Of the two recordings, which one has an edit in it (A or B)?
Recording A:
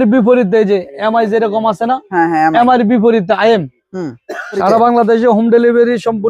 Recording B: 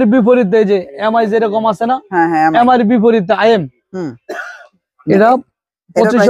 A